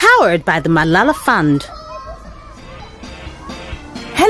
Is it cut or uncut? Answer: cut